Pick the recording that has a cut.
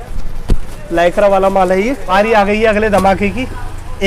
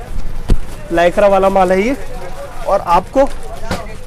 first; 1 cut; at 2.0 s

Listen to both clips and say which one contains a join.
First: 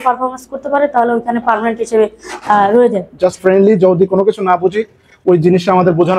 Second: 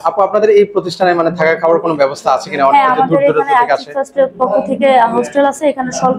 first; 1 cut; at 3.1 s

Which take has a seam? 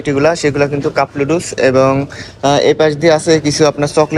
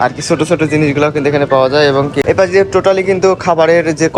second; 1 cut; at 2.2 s

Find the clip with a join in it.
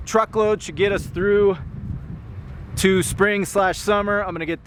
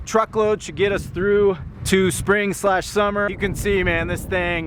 second; 2 cuts; at 1.7 s, 3.3 s

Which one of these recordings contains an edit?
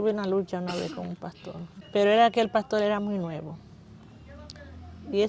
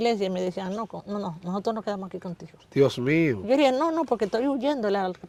first; 1 cut; at 1.7 s

